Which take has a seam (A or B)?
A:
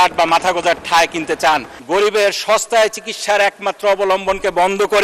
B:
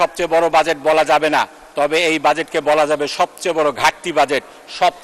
A